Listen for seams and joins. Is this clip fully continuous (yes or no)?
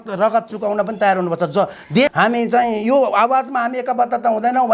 no